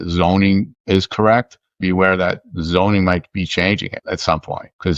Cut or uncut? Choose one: cut